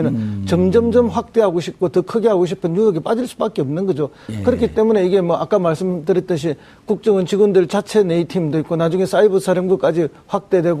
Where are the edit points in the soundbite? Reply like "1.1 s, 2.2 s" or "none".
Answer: 4.2 s